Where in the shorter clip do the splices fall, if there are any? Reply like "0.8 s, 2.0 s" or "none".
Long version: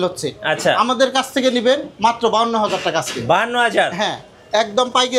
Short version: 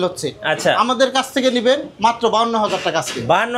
none